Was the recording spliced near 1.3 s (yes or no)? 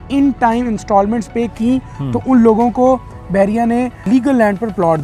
no